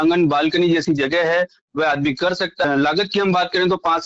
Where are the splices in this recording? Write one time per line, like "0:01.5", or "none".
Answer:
0:02.6